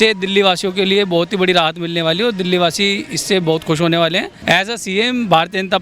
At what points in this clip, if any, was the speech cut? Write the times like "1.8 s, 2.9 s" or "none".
4.4 s

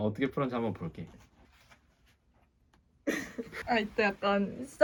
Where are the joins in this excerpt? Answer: none

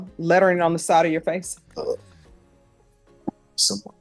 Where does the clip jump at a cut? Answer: 1.6 s

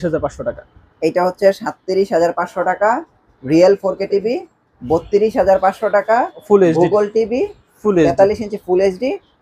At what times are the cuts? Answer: none

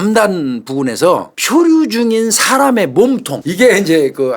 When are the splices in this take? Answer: 1.3 s, 3.4 s

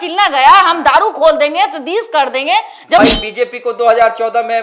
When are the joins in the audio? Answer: 3.0 s

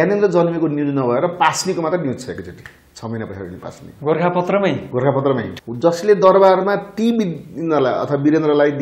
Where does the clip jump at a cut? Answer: 5.5 s

